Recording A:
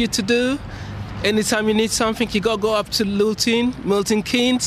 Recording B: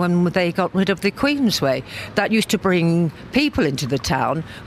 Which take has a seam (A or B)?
B